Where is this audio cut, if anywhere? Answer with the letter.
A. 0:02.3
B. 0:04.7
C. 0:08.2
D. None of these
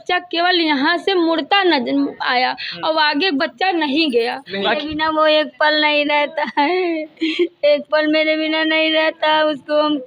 B